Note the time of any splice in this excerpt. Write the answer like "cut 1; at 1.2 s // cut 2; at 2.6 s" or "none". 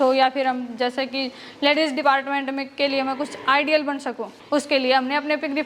none